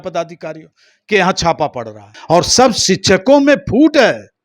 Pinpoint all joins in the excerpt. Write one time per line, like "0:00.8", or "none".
0:02.1

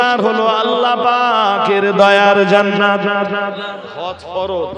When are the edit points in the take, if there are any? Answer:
0:03.8

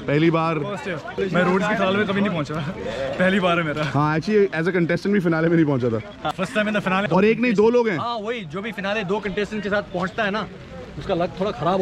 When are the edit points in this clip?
0:01.1
0:06.6

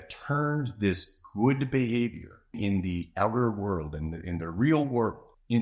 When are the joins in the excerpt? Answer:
0:02.6

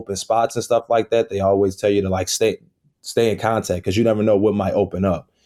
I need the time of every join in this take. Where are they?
none

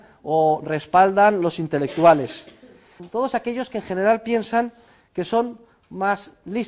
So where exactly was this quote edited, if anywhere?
0:05.6

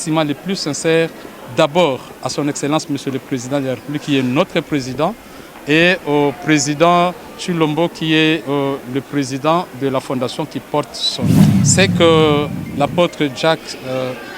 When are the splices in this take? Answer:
0:11.5

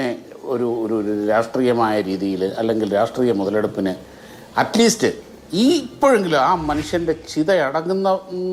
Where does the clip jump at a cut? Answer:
none

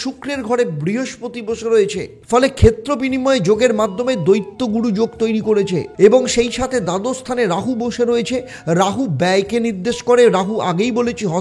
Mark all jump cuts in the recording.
0:02.1
0:05.9

